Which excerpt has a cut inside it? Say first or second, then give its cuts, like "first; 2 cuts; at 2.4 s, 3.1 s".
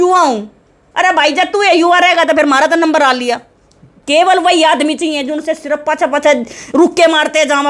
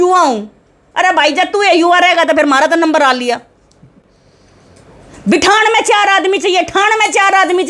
first; 1 cut; at 3.9 s